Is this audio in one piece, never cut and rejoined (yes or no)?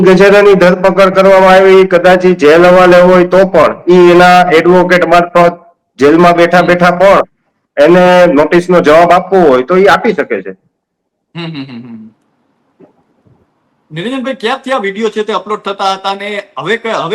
yes